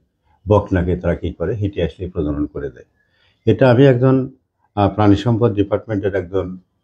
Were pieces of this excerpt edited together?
no; 0 cuts

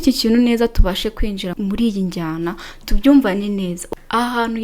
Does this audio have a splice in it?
yes; 2 cuts; at 1.5 s, 3.8 s

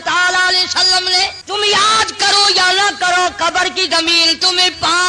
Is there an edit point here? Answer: yes; 1 cut; at 1.4 s

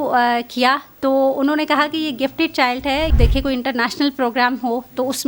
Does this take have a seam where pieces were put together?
yes; 1 cut; at 3.1 s

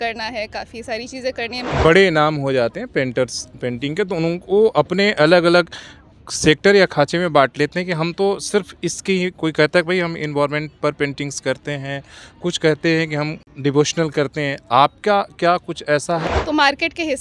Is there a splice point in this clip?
yes; 3 cuts; at 1.6 s, 13.4 s, 16.2 s

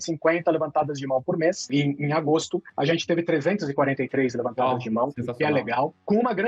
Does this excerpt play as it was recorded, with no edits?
no; 1 cut; at 1.6 s

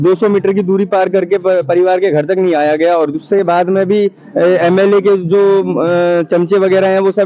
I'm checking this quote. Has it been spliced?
no; 0 cuts

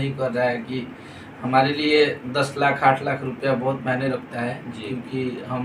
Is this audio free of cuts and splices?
yes; 0 cuts

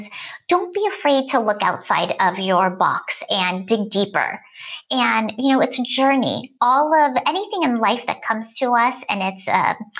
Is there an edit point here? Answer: no; 0 cuts

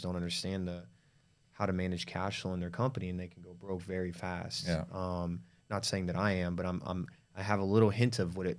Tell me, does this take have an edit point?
no; 0 cuts

